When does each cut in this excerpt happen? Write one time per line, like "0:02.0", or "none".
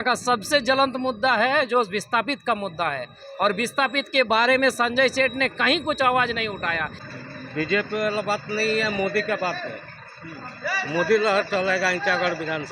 0:07.0